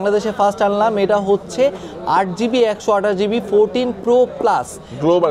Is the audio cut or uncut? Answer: uncut